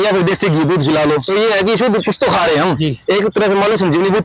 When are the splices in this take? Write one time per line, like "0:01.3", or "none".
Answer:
0:01.2
0:02.8